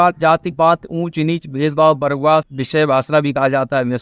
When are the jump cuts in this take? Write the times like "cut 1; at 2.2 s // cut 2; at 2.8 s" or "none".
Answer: cut 1; at 2.6 s